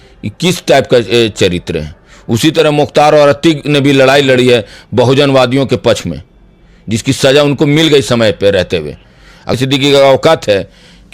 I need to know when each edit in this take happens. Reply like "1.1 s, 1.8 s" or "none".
9.6 s